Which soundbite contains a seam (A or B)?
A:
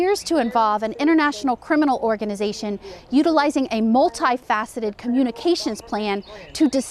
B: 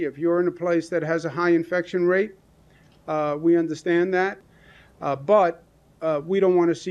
B